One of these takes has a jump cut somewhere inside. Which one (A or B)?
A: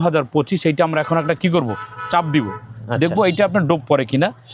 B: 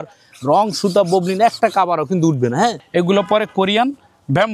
B